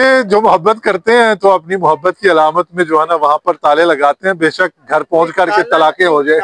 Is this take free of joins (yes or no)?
yes